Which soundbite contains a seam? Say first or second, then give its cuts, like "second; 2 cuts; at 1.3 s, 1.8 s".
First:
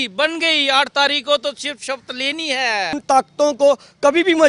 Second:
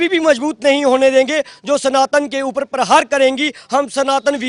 first; 1 cut; at 3.0 s